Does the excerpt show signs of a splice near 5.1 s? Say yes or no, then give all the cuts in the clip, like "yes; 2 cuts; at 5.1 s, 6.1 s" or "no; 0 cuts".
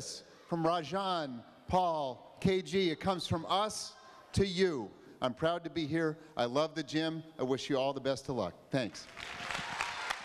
yes; 1 cut; at 5.1 s